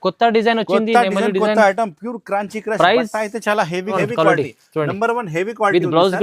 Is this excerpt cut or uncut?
cut